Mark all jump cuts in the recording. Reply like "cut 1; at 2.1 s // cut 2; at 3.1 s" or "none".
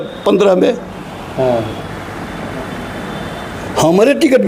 none

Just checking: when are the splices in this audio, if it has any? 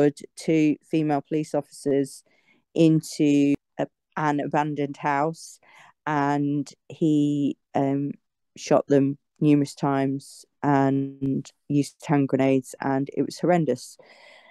cut 1; at 3.6 s

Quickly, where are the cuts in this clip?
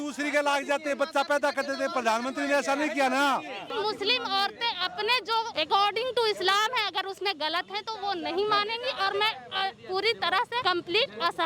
cut 1; at 3.7 s // cut 2; at 5.5 s // cut 3; at 10.6 s

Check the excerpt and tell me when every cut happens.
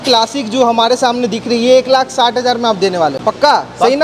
none

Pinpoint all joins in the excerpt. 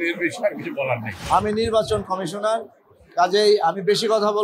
cut 1; at 1.2 s

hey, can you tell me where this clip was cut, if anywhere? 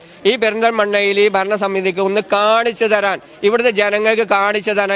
none

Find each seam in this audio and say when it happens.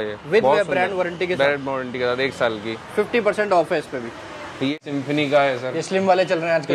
cut 1; at 4.7 s

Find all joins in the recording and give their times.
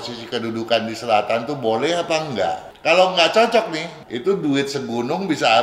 cut 1; at 2.7 s // cut 2; at 3.9 s

